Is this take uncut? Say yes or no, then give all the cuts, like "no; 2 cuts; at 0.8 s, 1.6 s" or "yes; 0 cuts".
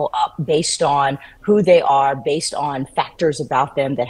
yes; 0 cuts